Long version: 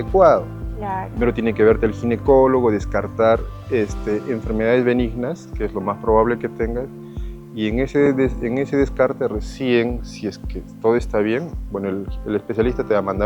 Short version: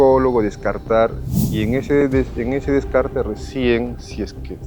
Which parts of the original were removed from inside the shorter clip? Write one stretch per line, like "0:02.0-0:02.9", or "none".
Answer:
0:03.5-0:07.3